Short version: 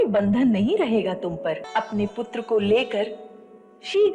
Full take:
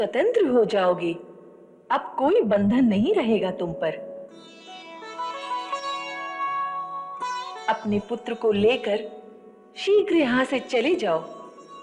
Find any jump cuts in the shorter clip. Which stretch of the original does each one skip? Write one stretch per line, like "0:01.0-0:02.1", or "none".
0:04.0-0:07.6